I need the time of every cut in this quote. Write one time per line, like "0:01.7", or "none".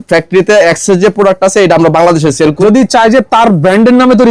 0:02.6